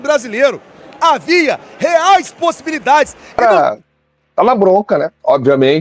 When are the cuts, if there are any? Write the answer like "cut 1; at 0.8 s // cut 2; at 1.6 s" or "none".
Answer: cut 1; at 3.3 s